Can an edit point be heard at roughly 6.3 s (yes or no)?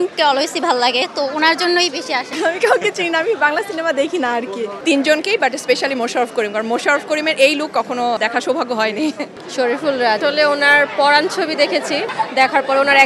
no